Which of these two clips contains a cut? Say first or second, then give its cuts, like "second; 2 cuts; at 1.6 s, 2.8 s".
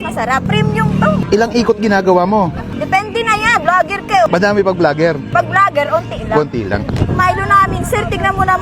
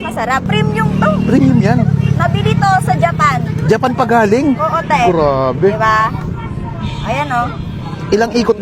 first; 3 cuts; at 1.2 s, 2.7 s, 6.8 s